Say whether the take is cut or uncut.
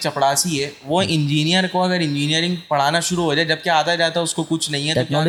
uncut